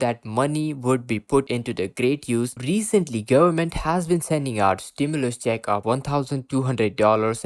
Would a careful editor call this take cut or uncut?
cut